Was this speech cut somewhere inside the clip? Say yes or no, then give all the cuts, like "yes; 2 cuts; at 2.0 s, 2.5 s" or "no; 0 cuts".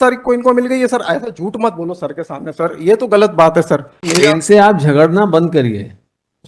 yes; 1 cut; at 4.1 s